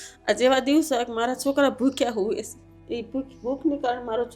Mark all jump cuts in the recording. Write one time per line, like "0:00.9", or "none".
0:02.7